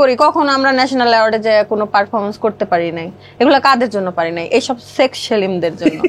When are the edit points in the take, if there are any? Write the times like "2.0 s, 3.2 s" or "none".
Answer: none